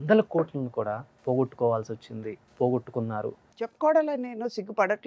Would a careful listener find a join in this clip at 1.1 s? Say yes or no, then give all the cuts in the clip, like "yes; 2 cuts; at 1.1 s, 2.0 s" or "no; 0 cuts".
yes; 3 cuts; at 1.1 s, 2.4 s, 3.4 s